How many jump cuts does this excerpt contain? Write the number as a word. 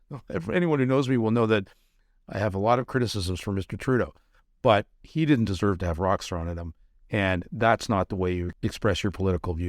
one